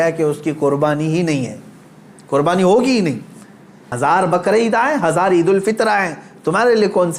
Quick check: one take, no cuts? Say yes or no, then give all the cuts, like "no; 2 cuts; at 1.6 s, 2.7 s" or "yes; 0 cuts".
no; 1 cut; at 3.9 s